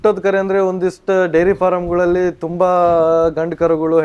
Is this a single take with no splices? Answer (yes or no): yes